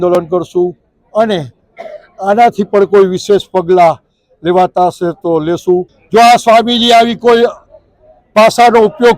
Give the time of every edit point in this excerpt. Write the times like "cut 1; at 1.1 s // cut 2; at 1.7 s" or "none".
cut 1; at 6.0 s